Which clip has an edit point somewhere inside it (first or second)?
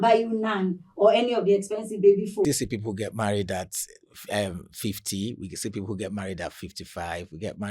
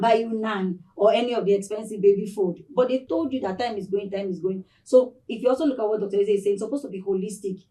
first